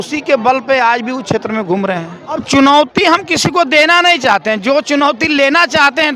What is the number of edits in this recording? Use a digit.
1